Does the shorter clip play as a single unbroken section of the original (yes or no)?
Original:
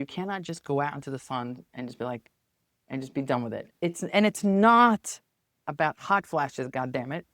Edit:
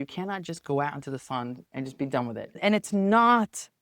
no